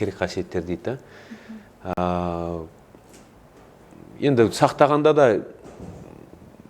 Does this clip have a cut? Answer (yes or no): no